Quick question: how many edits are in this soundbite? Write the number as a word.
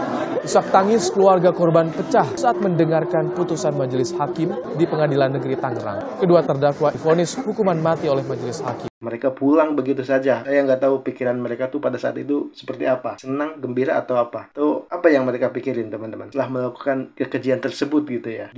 two